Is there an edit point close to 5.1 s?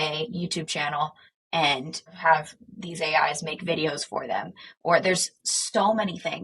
no; 1 cut; at 2.1 s

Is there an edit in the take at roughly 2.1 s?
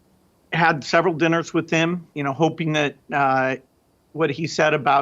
yes; 1 cut; at 2.1 s

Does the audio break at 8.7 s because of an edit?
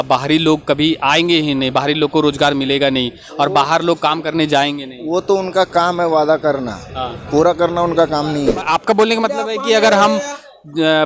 yes; 1 cut; at 8.7 s

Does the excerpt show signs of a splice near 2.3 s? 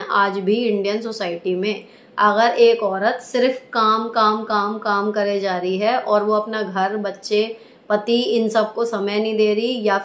no; 0 cuts

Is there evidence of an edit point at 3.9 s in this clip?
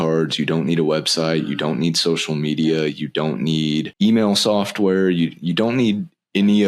yes; 1 cut; at 3.9 s

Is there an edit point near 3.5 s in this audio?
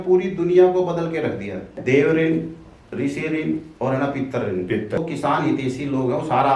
no; 2 cuts; at 1.8 s, 5.0 s

